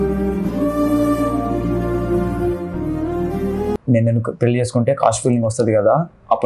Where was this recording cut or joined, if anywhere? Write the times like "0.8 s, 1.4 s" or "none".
3.8 s